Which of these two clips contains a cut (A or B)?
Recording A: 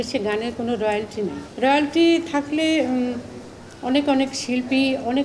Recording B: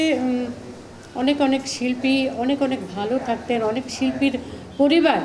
A